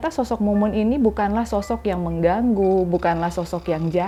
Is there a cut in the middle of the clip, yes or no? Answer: no